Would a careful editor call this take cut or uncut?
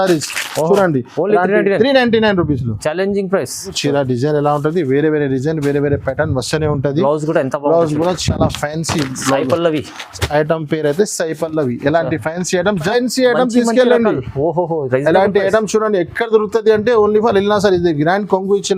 cut